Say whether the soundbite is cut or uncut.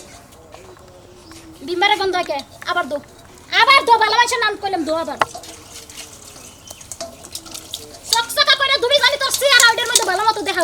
uncut